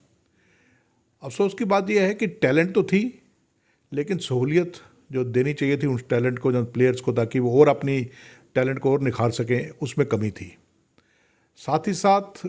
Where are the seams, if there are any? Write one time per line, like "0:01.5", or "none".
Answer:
none